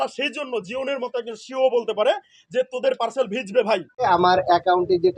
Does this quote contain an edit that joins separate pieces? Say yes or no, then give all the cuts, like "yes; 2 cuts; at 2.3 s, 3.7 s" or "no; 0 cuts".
no; 0 cuts